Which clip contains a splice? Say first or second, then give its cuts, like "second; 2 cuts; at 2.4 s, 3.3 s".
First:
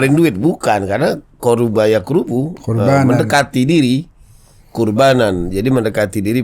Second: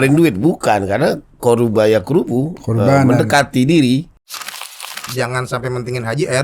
second; 1 cut; at 4.6 s